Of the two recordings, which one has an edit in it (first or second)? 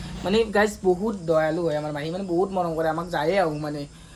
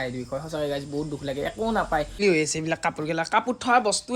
second